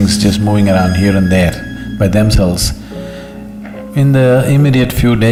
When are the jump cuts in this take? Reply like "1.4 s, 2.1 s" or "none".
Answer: none

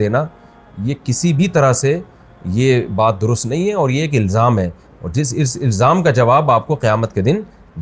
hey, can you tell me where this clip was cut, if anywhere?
none

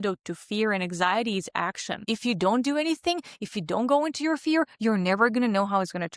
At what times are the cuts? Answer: 2.0 s

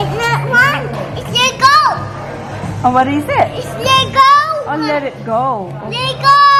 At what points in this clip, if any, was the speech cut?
none

